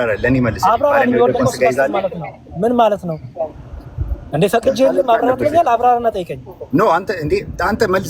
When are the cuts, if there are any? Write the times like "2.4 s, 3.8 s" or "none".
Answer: none